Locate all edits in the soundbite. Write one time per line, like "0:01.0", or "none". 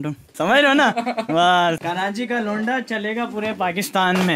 0:01.8